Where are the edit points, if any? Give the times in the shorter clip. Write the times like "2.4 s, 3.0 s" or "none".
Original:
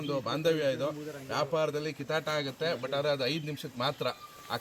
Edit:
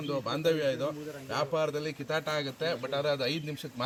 none

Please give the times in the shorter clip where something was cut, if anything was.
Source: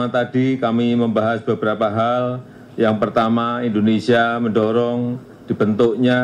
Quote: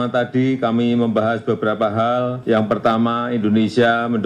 2.4 s

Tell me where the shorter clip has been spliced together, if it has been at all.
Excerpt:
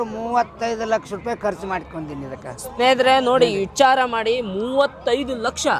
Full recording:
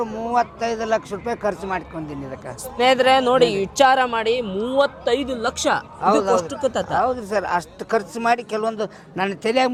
none

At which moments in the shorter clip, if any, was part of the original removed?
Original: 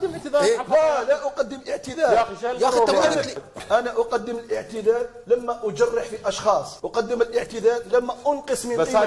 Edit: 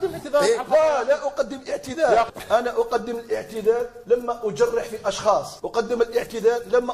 2.4 s

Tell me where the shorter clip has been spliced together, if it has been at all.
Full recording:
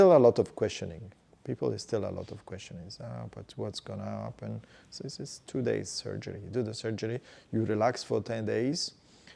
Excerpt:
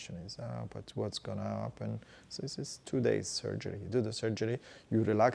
none

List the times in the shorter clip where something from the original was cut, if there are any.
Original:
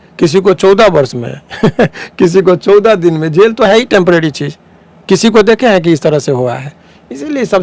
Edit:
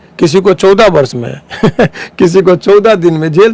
none

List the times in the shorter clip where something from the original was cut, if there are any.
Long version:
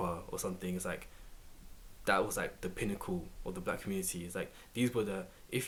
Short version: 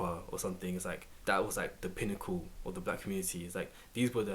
1.1 s

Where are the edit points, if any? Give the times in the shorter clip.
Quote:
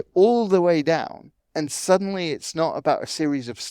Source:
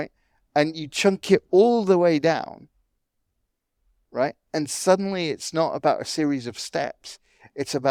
1.4 s

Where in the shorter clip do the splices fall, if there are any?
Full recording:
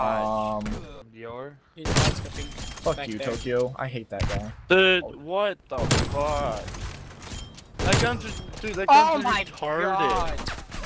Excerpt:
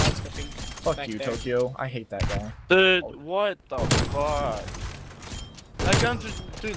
none

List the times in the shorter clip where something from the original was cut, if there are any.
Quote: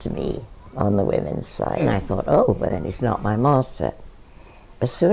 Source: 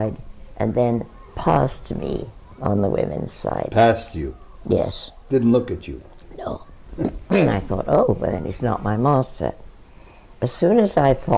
1.8 s

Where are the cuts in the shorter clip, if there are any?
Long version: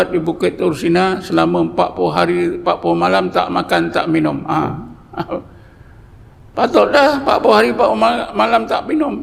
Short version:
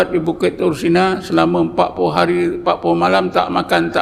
none

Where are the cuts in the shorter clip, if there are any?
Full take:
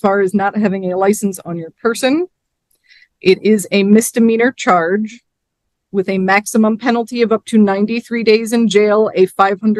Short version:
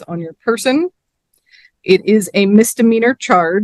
none

